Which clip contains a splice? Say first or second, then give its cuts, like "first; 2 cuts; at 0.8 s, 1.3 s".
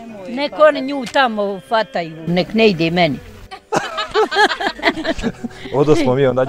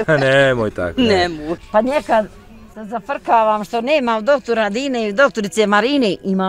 second; 1 cut; at 1.5 s